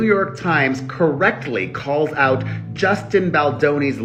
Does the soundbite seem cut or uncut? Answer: uncut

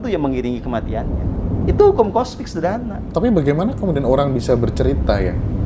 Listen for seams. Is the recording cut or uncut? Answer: uncut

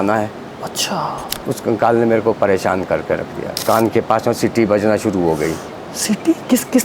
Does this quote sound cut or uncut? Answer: cut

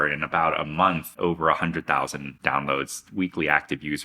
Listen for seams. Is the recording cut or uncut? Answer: cut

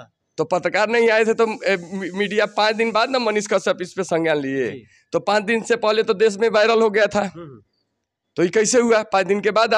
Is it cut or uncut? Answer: uncut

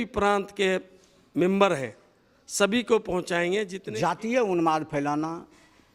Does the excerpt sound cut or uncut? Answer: cut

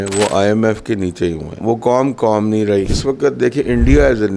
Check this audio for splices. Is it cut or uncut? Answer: cut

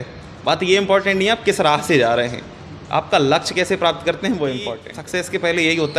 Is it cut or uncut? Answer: cut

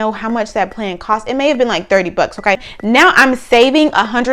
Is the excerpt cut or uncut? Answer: cut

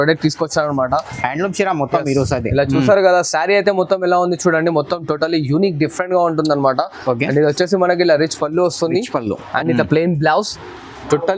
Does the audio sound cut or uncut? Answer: uncut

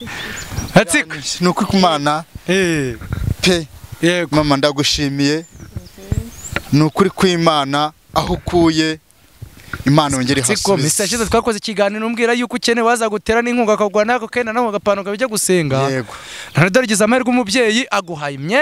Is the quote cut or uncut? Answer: uncut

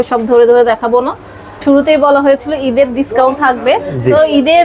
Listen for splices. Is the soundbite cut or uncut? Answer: cut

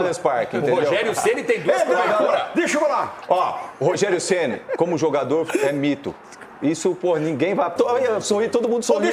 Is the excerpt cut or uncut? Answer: cut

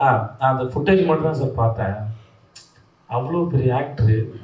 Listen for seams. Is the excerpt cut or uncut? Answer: uncut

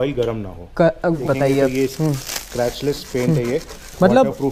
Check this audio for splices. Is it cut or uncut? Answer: cut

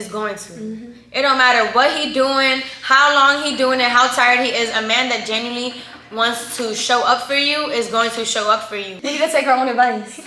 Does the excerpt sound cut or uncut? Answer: cut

